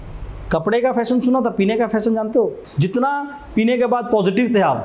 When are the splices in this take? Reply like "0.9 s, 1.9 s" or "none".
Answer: 2.6 s